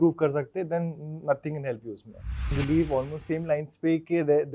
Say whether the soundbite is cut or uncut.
cut